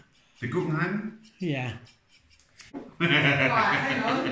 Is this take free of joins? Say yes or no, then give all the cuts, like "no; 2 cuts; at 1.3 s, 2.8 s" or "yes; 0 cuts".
no; 1 cut; at 2.7 s